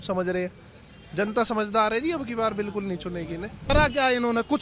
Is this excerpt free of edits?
no; 1 cut; at 3.7 s

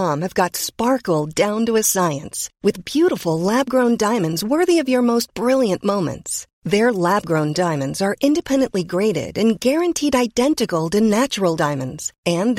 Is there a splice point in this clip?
no; 0 cuts

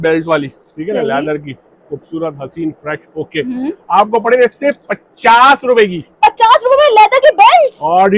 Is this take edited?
no; 0 cuts

